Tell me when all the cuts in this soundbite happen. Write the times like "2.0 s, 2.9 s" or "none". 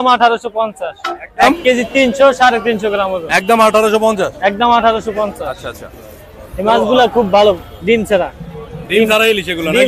none